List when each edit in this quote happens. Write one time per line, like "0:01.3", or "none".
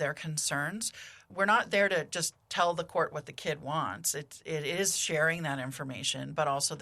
none